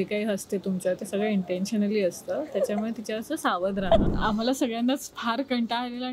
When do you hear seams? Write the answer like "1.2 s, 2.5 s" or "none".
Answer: 4.1 s, 5.1 s